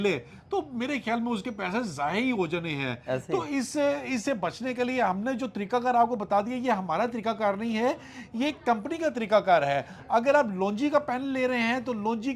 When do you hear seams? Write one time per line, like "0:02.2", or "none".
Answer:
none